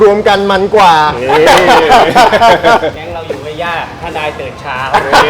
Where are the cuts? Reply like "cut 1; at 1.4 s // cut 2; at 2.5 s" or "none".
cut 1; at 2.9 s